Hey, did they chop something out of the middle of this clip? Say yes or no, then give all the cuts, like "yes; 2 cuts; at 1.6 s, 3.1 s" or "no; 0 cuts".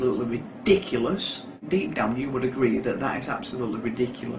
yes; 1 cut; at 1.6 s